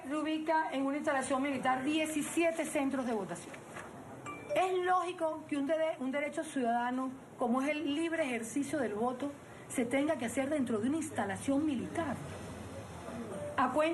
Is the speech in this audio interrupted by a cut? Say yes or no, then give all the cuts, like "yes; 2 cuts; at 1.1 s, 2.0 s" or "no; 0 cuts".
yes; 1 cut; at 9.3 s